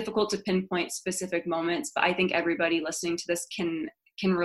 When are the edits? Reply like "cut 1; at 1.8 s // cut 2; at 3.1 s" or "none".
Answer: none